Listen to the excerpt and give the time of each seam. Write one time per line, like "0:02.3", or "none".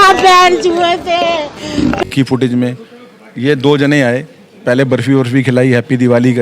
0:02.0